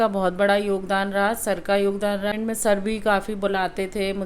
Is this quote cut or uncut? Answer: cut